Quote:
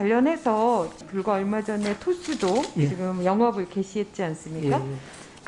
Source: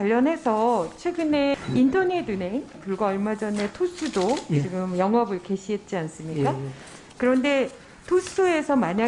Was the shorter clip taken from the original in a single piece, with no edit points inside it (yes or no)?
no